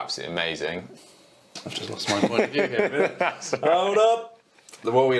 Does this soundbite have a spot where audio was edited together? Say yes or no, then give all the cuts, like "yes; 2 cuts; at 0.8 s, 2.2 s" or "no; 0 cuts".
yes; 1 cut; at 0.9 s